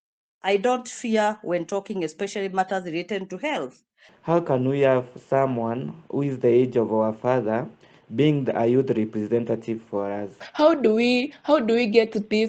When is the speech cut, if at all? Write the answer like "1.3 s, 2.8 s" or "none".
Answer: 4.1 s, 10.4 s